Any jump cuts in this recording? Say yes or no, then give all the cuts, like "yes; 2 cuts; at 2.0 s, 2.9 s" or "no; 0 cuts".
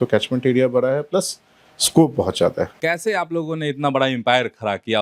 yes; 1 cut; at 2.7 s